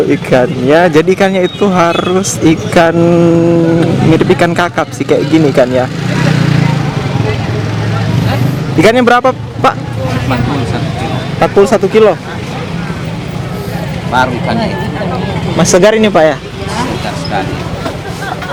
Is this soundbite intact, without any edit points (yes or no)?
yes